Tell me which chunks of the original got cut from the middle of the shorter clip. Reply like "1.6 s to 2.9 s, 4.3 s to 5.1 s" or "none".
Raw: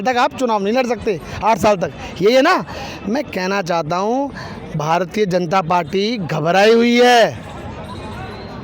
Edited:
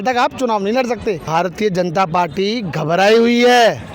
1.2 s to 4.8 s